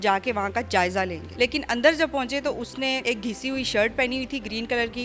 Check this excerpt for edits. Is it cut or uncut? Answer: cut